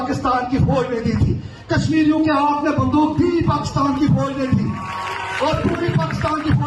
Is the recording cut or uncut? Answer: uncut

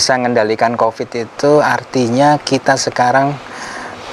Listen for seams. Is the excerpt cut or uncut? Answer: uncut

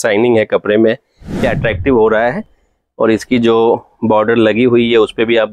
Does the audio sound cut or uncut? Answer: cut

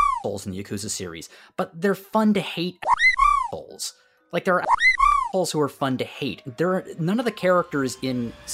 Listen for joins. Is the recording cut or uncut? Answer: uncut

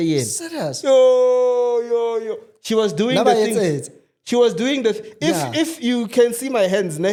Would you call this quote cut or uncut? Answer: uncut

